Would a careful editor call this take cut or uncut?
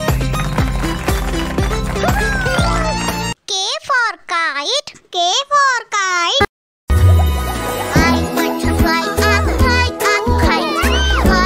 cut